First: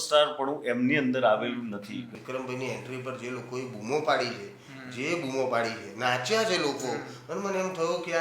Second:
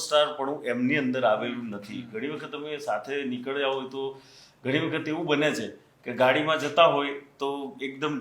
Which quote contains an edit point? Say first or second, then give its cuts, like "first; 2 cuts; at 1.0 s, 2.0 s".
first; 1 cut; at 2.1 s